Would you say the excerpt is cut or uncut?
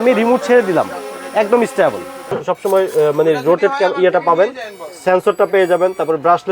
cut